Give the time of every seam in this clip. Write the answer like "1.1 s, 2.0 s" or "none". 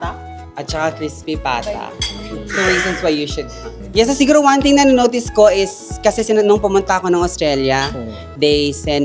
3.8 s